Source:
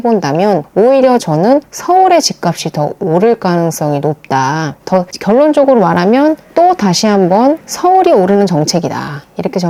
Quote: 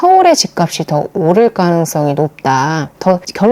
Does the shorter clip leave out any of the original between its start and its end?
no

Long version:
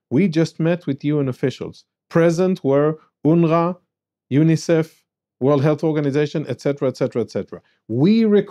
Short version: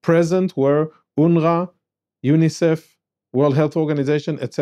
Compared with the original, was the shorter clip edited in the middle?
no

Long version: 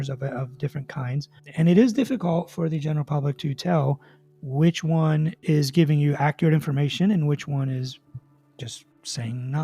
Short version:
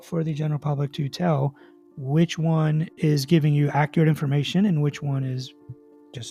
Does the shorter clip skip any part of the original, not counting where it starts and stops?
no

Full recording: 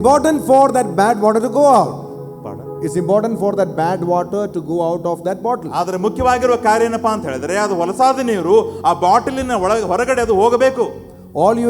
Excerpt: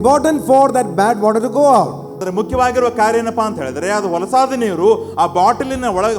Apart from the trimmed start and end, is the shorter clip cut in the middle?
yes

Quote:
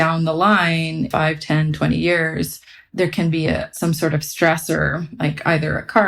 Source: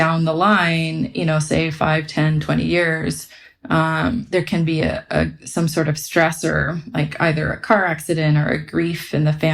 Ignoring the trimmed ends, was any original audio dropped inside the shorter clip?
yes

